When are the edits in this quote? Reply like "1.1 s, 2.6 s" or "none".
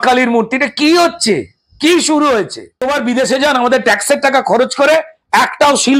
2.8 s